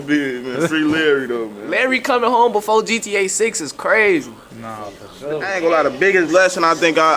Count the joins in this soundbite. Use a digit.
2